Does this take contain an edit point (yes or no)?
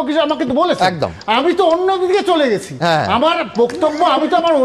no